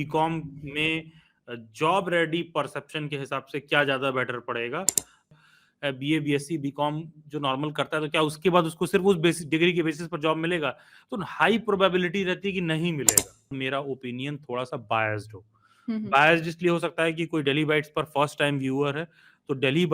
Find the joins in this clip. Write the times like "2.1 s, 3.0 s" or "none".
5.3 s, 13.5 s